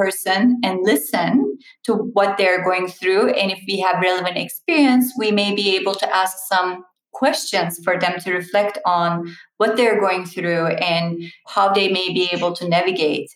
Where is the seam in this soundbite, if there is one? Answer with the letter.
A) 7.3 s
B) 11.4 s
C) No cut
C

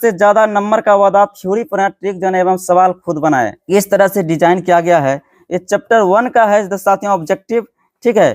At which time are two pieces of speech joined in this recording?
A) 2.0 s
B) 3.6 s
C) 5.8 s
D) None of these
B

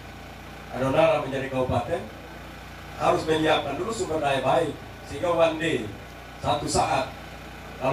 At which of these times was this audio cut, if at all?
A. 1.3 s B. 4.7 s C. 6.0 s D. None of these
D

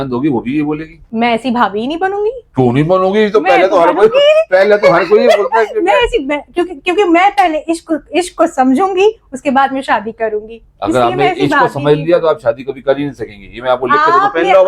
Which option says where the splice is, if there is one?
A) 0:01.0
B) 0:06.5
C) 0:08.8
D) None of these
A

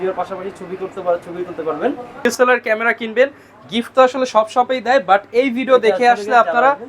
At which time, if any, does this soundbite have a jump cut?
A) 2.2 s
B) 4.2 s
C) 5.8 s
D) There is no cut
A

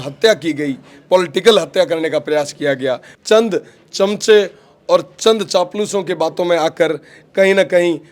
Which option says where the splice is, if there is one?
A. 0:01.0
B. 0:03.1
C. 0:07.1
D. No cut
B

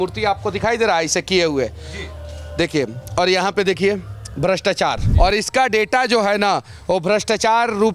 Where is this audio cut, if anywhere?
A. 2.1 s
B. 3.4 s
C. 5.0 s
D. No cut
C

